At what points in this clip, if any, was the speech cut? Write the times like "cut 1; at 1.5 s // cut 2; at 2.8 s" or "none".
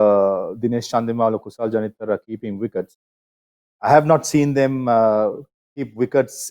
none